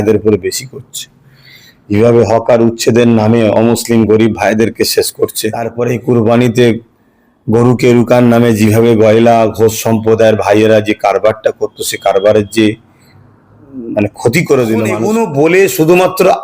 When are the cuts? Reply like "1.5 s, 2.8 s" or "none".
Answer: 5.7 s, 15.0 s